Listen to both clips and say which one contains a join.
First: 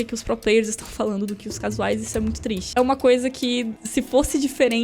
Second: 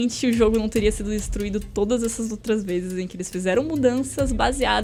first; 2 cuts; at 2.7 s, 3.8 s

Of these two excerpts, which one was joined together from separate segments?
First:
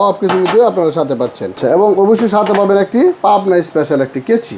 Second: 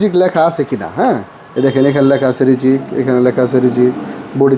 first; 1 cut; at 1.5 s

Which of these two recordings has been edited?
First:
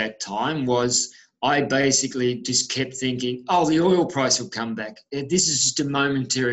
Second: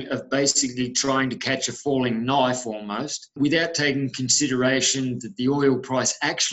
second; 1 cut; at 3.2 s

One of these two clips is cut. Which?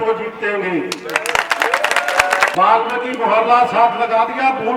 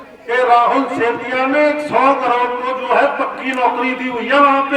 first; 1 cut; at 2.5 s

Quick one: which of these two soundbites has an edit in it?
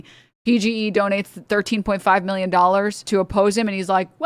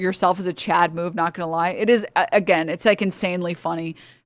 first; 2 cuts; at 1.3 s, 3.0 s

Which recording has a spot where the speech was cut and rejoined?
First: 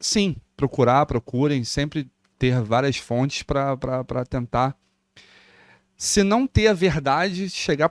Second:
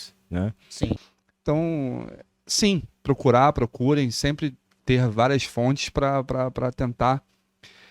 second; 1 cut; at 1.0 s

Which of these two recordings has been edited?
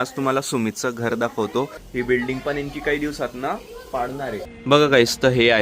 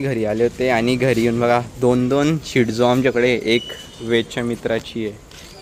first; 2 cuts; at 1.8 s, 4.5 s

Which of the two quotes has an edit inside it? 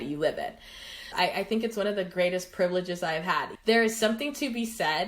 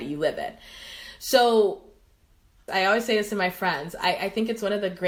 first; 2 cuts; at 1.0 s, 3.5 s

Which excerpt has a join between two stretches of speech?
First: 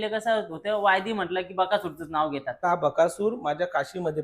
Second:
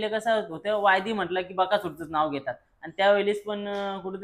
first; 1 cut; at 2.6 s

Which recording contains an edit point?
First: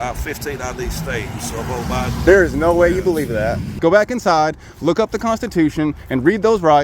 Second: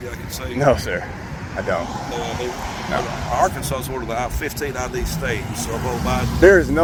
first; 1 cut; at 3.7 s

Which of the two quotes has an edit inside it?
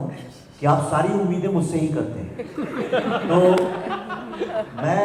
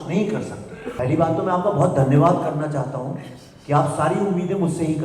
second; 1 cut; at 0.9 s

